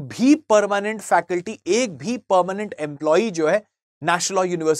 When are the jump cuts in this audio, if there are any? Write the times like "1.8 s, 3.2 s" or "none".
none